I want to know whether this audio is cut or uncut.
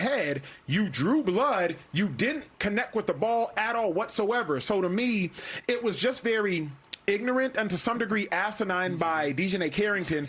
uncut